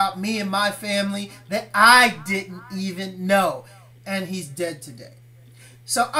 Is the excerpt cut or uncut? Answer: cut